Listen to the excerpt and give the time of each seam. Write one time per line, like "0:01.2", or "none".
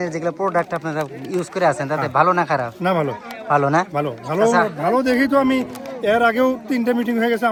none

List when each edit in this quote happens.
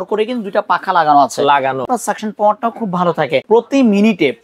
0:01.9
0:03.4

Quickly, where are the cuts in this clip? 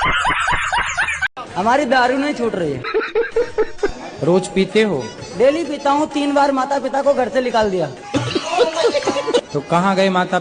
0:01.2

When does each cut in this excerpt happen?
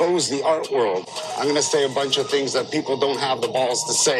0:01.2

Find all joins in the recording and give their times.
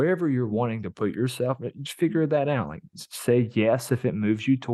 none

